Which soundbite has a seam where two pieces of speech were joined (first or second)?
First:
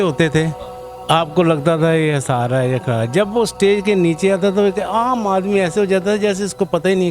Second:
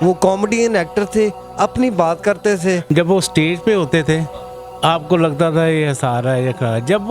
second